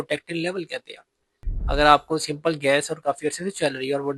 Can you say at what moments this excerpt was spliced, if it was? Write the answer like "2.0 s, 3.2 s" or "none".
1.3 s